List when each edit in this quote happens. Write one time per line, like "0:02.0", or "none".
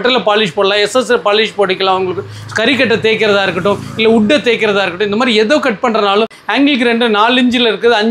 0:06.4

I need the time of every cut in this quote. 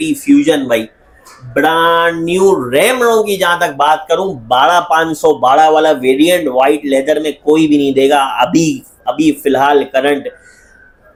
none

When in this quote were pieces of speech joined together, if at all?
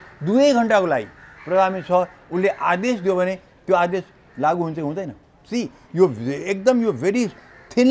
none

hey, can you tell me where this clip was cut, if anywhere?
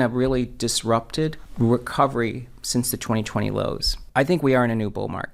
0:01.4
0:03.9

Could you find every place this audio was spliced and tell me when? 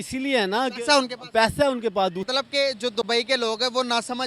0:02.2

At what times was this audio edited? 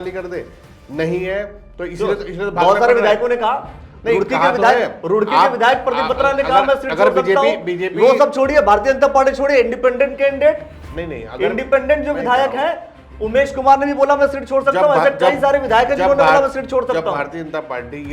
none

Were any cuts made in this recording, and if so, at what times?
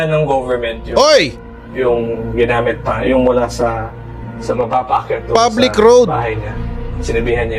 none

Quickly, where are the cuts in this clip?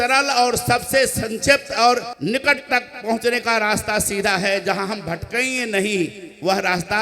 0:02.1

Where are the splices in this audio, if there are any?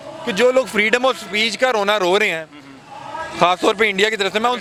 none

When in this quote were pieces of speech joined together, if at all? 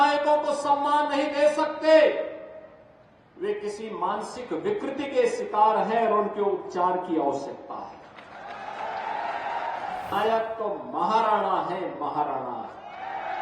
0:10.1

